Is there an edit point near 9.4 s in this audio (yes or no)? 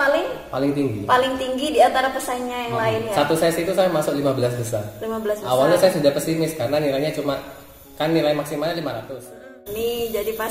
yes